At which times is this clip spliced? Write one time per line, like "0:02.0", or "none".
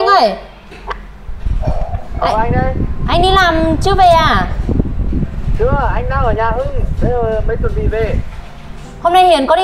none